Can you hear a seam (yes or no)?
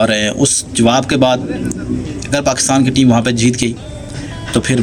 no